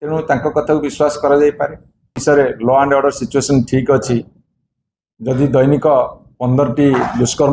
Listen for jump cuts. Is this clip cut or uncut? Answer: cut